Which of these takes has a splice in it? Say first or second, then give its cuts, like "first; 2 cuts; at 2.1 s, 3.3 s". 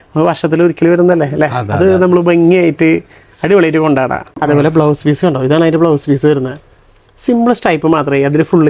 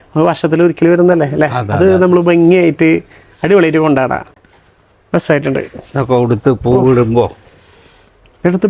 first; 1 cut; at 4.3 s